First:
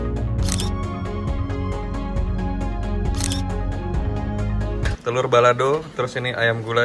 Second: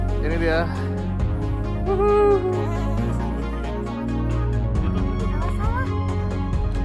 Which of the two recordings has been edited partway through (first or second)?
first